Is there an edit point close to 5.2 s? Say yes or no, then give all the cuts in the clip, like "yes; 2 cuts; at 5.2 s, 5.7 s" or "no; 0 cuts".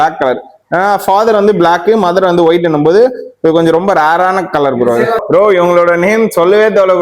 yes; 1 cut; at 5.2 s